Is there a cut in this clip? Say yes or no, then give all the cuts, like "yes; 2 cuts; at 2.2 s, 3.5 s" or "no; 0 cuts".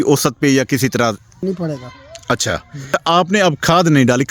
yes; 2 cuts; at 1.4 s, 2.9 s